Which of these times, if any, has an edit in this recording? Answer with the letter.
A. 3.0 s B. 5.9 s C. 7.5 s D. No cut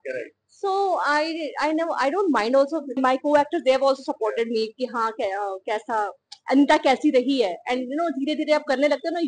A